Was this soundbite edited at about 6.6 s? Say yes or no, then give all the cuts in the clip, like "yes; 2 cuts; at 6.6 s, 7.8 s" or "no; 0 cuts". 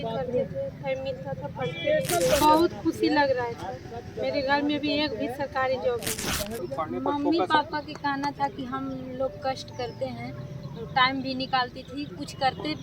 yes; 2 cuts; at 2.4 s, 6.6 s